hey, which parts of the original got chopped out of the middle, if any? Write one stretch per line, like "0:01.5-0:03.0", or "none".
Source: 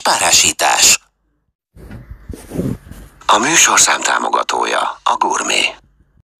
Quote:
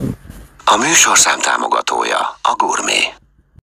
none